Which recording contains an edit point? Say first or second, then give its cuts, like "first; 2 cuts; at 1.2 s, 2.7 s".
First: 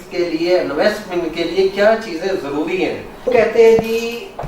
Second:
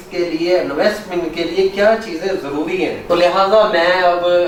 first; 1 cut; at 3.0 s